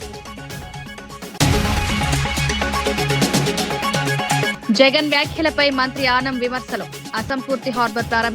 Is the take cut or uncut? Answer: cut